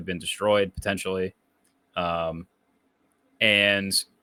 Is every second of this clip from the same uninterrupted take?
yes; 0 cuts

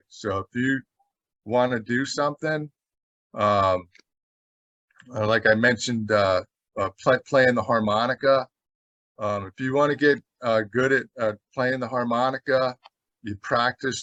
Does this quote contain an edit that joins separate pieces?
no; 0 cuts

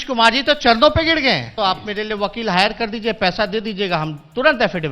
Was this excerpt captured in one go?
no; 1 cut; at 1.5 s

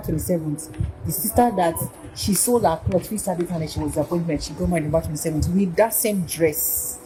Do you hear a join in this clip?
no; 0 cuts

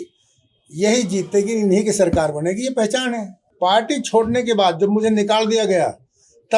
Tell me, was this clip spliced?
yes; 1 cut; at 3.4 s

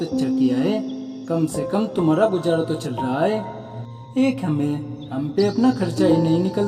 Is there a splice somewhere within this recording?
no; 0 cuts

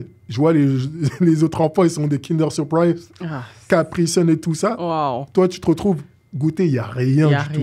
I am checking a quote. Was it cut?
no; 0 cuts

